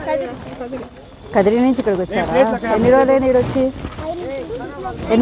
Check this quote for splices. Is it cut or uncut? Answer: uncut